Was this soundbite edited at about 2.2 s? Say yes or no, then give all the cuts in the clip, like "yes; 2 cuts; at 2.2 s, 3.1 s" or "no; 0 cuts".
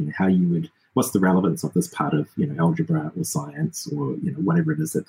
no; 0 cuts